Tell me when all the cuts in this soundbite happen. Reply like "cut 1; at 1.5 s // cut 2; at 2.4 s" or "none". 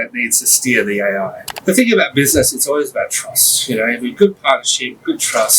cut 1; at 1.5 s

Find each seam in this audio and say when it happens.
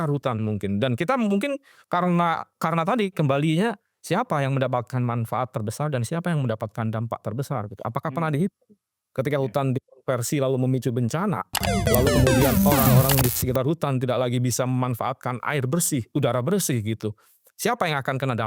none

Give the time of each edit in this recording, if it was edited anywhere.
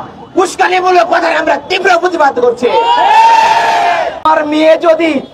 cut 1; at 4.3 s

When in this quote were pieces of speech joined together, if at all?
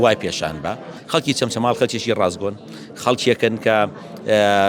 cut 1; at 0.9 s

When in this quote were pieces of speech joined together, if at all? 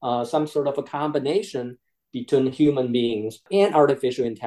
cut 1; at 3.4 s

